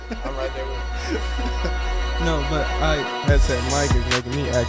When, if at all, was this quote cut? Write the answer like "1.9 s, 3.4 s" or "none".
3.1 s